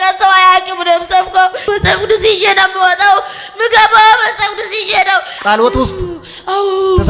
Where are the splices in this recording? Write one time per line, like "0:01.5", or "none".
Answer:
0:01.6
0:05.4